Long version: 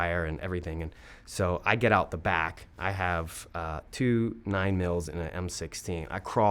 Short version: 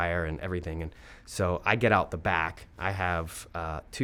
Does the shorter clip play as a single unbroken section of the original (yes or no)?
yes